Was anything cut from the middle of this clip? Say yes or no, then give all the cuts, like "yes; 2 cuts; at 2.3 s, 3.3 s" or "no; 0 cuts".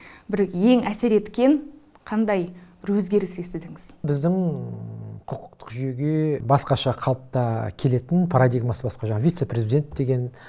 yes; 2 cuts; at 4.1 s, 6.4 s